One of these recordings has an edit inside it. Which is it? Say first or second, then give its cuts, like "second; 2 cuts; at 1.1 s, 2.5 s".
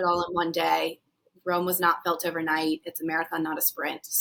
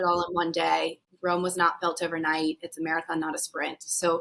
second; 1 cut; at 1.0 s